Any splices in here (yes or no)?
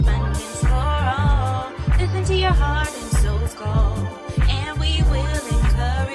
no